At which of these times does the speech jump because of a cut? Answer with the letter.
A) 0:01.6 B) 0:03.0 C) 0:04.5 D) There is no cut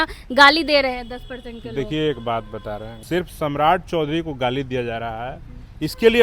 B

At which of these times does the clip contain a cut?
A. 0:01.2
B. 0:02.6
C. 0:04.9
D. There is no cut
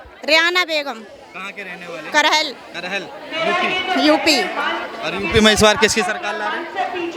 D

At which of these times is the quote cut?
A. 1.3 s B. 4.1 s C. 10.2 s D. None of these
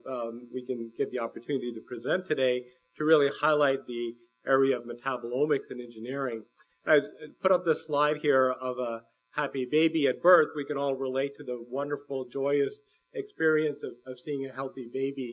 A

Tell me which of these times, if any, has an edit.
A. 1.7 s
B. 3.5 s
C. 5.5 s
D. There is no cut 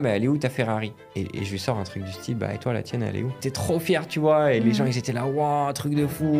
B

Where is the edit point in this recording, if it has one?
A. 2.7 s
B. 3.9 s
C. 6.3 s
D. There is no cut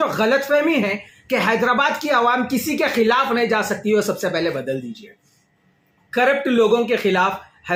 D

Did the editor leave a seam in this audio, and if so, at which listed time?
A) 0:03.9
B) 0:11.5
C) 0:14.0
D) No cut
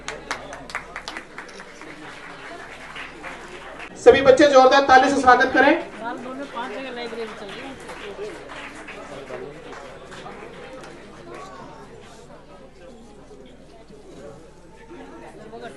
A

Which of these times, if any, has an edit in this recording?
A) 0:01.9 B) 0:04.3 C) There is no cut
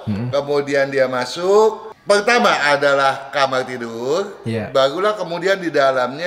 A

